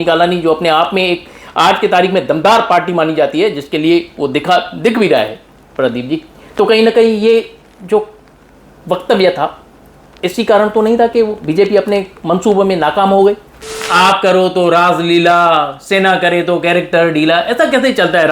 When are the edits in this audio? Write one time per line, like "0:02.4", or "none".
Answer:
0:13.9